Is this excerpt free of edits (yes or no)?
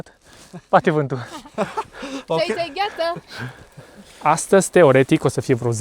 no